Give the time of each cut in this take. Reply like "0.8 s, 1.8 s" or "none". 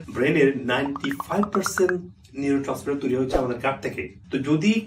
none